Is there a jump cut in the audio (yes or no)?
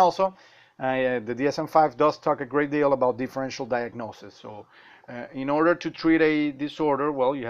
no